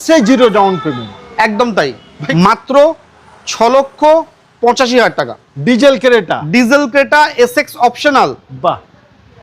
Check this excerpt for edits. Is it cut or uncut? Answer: cut